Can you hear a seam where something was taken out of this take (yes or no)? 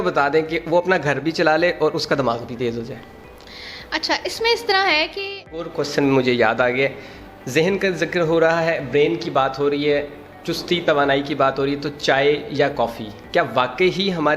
yes